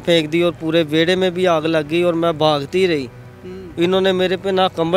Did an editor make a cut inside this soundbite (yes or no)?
no